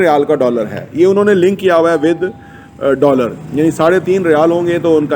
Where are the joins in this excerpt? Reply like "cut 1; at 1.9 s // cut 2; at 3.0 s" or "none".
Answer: none